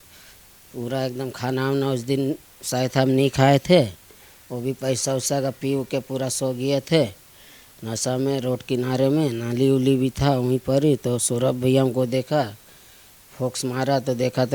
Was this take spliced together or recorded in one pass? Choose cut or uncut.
uncut